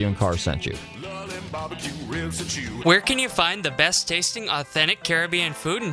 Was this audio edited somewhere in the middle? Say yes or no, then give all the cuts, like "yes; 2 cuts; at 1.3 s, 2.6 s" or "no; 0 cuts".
yes; 1 cut; at 2.8 s